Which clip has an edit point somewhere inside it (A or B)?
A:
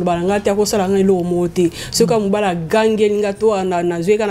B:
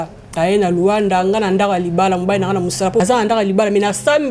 B